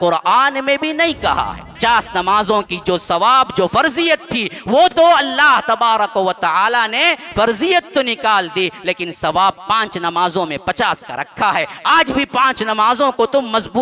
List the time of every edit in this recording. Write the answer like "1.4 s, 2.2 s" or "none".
1.8 s